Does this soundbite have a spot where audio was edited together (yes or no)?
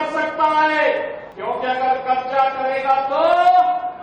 yes